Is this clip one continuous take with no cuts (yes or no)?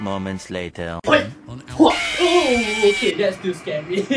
no